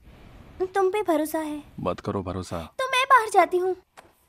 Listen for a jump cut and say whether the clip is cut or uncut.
cut